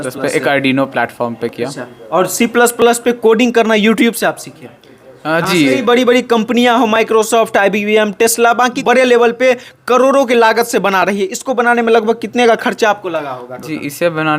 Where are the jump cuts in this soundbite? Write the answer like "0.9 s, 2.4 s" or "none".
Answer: 5.8 s, 8.8 s